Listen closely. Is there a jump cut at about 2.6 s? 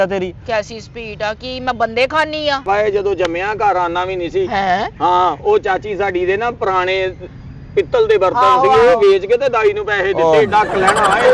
yes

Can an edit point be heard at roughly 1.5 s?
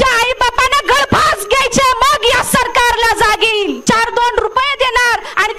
no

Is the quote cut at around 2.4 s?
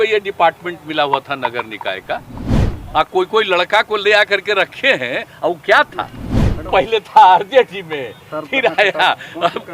yes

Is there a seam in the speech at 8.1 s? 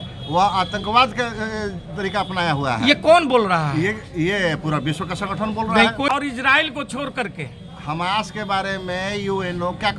no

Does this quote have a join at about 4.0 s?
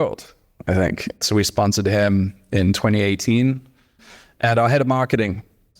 yes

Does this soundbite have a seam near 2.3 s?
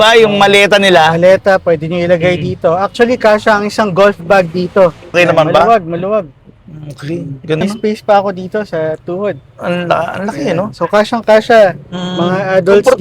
no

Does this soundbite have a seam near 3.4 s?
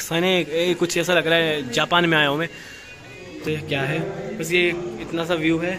yes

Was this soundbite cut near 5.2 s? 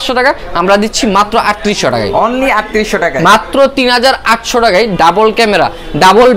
no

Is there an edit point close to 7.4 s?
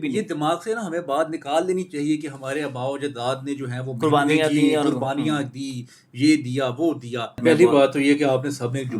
yes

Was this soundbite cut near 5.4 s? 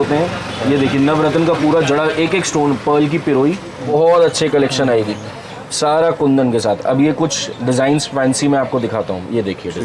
no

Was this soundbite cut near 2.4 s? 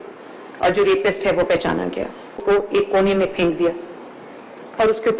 yes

